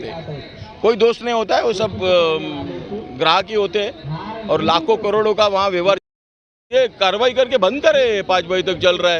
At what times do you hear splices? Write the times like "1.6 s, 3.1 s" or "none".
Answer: 6.7 s

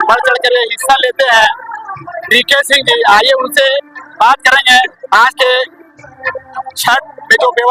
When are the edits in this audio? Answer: none

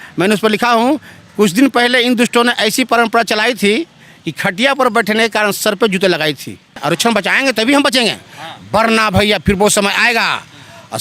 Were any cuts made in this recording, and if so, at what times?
6.8 s

